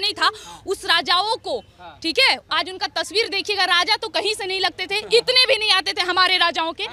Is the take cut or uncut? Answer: uncut